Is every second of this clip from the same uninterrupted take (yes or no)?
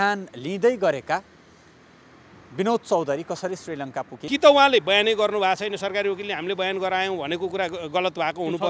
no